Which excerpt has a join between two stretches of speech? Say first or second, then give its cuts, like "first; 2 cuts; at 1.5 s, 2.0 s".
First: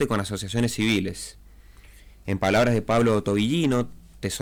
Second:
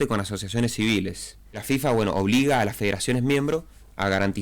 second; 1 cut; at 1.6 s